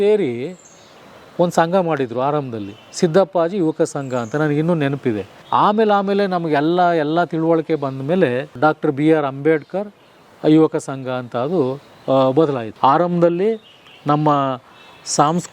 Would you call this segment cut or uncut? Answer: cut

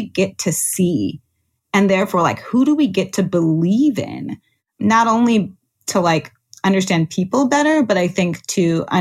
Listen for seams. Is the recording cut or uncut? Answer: cut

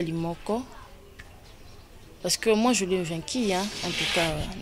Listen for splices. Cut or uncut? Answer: uncut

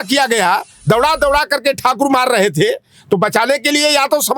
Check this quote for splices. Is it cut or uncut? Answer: uncut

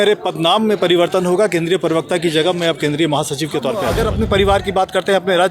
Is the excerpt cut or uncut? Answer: cut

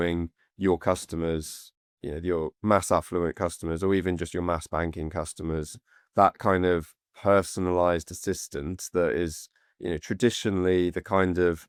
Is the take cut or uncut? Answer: uncut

